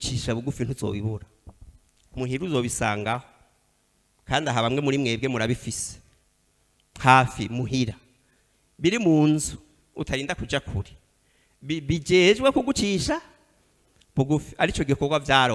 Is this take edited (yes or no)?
no